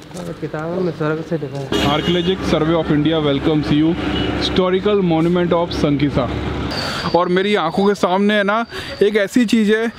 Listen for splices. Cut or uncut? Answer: cut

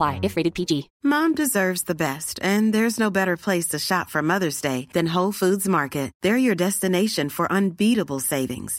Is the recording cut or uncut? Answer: cut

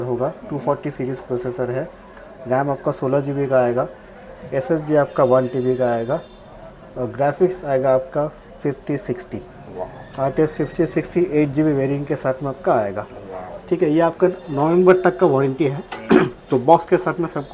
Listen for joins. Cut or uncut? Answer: uncut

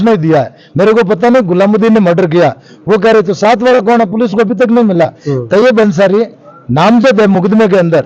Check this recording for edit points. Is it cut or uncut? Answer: uncut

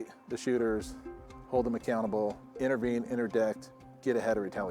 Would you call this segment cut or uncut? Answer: cut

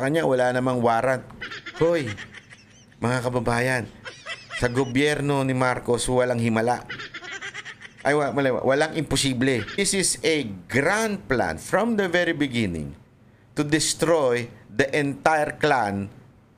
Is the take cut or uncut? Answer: cut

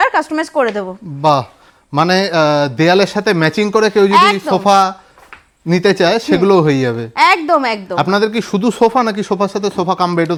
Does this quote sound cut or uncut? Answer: uncut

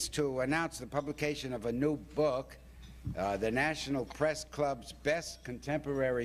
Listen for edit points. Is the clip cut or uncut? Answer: uncut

